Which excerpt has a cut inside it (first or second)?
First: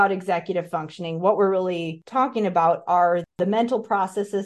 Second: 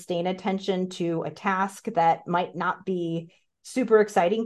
first